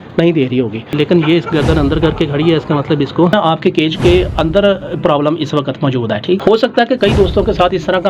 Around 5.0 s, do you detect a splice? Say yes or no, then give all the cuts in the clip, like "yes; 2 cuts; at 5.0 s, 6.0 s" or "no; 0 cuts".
no; 3 cuts; at 0.9 s, 3.3 s, 6.4 s